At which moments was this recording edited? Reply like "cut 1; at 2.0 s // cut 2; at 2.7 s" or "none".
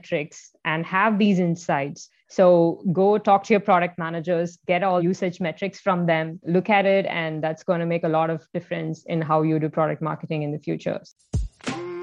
cut 1; at 11.1 s